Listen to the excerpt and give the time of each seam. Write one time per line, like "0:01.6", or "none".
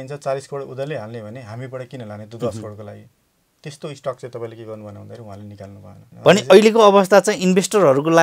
0:06.1